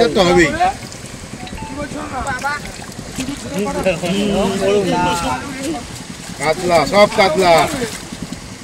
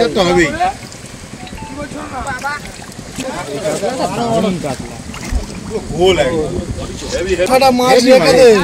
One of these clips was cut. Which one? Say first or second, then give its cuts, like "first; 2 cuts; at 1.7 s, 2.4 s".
second; 2 cuts; at 3.2 s, 7.4 s